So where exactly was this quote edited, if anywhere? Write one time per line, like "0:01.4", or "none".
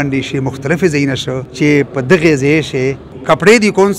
0:01.4
0:03.1